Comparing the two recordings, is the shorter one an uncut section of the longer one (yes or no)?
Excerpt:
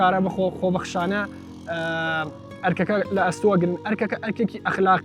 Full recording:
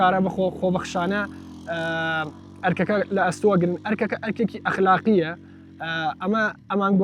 yes